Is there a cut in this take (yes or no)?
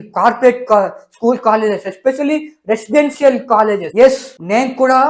yes